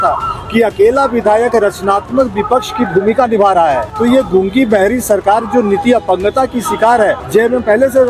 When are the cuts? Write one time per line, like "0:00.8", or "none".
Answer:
0:03.9
0:07.2